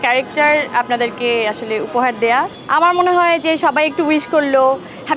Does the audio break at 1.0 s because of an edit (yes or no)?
no